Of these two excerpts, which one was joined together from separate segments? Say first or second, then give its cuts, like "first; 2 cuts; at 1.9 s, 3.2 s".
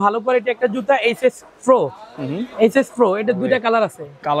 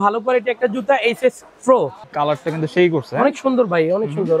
second; 1 cut; at 2.0 s